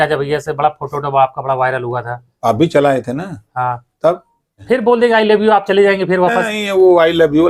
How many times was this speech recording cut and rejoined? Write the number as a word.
one